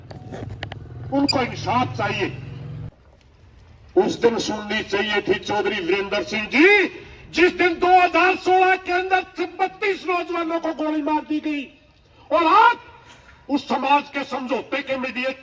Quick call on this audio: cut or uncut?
cut